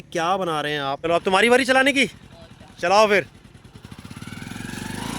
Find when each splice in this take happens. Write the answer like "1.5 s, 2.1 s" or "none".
1.0 s